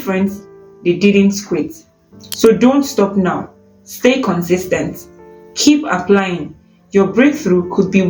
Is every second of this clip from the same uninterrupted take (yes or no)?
yes